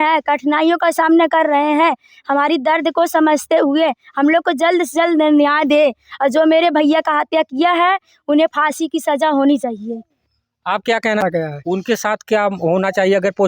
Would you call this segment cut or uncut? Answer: cut